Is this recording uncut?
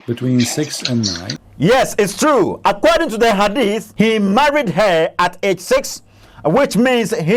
no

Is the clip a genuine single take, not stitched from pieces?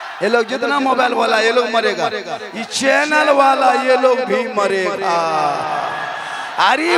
yes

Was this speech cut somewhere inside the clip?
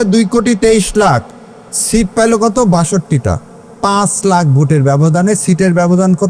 no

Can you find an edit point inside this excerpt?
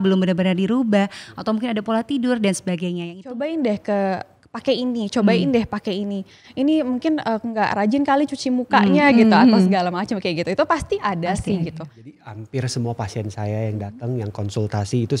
yes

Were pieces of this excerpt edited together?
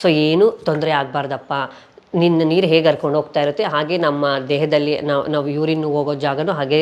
no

